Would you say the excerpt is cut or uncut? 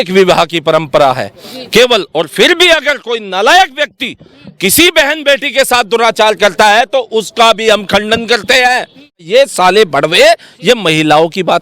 cut